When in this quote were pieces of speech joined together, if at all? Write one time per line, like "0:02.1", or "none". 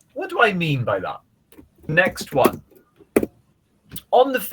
0:01.9